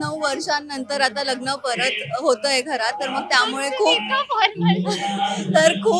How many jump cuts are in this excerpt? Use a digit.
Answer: 0